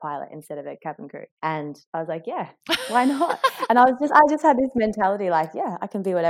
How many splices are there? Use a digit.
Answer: 0